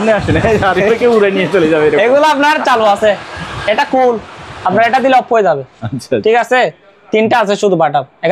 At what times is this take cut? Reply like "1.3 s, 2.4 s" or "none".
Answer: none